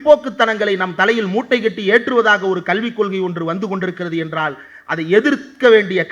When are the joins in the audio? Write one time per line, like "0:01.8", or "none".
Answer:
none